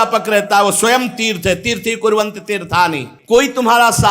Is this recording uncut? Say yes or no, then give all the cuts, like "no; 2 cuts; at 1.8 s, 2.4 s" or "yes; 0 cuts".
no; 1 cut; at 3.1 s